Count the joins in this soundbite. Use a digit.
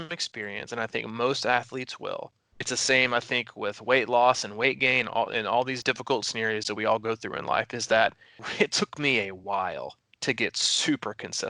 3